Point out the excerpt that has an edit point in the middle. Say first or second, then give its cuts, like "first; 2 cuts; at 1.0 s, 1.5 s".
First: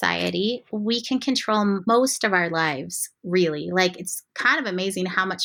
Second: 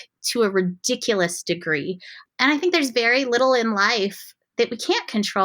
second; 1 cut; at 2.1 s